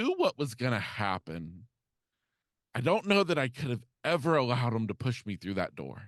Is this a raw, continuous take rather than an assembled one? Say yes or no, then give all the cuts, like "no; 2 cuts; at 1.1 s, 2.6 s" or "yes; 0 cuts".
yes; 0 cuts